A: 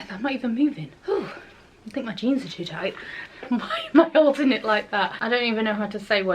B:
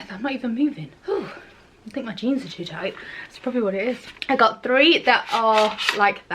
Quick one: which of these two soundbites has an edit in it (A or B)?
A